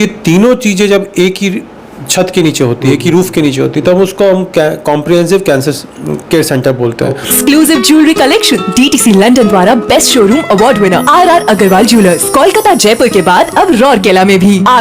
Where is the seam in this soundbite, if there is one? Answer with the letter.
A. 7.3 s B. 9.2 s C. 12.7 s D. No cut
A